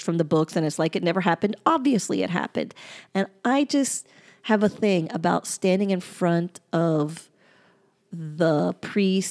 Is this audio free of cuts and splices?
yes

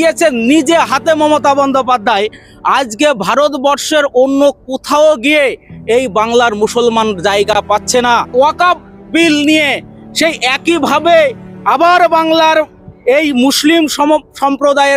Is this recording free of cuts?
no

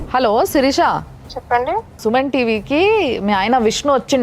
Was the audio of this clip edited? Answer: no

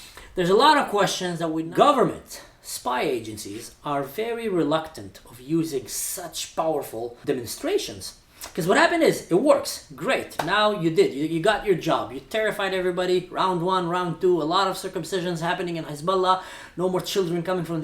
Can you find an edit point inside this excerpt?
yes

